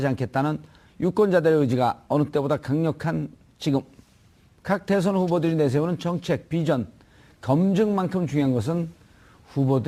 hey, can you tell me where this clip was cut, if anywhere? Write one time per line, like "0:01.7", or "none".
none